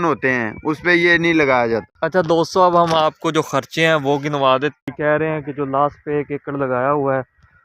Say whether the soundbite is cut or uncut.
cut